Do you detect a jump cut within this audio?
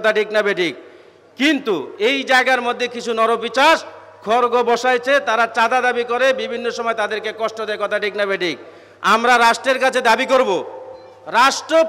no; 0 cuts

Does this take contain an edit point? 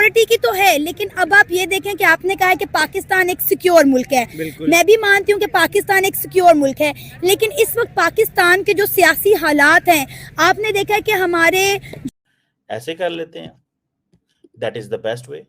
yes; 1 cut; at 12.0 s

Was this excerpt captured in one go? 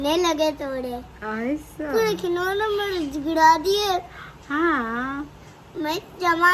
yes; 0 cuts

